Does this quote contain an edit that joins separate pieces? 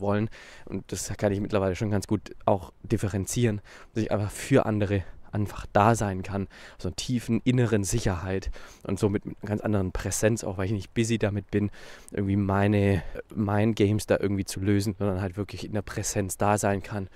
yes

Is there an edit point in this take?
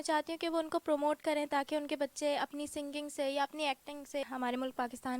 yes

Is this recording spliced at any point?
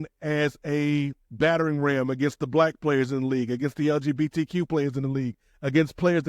yes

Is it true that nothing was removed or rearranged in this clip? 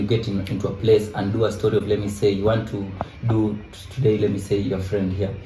yes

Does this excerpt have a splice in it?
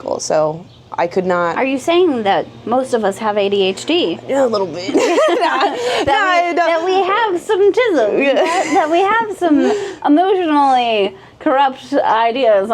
no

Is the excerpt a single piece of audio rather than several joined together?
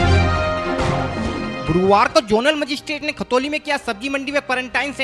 no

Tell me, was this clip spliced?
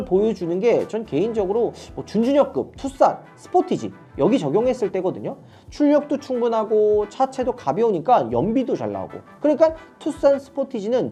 no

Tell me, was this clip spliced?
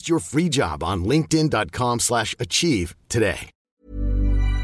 yes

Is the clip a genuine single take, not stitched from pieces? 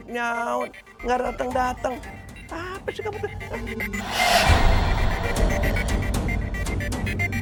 yes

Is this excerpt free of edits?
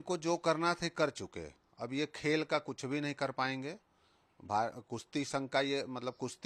yes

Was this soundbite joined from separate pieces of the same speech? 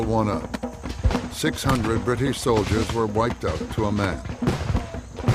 yes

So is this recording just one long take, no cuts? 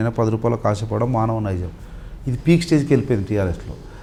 yes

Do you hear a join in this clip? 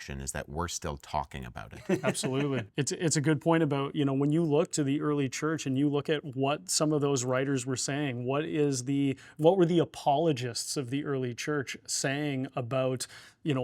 yes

